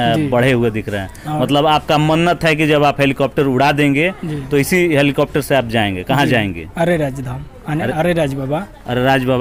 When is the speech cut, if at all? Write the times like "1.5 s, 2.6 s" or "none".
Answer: none